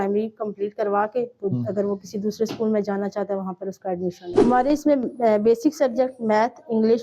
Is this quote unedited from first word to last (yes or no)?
no